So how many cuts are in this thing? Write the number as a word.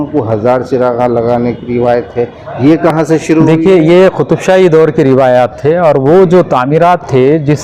zero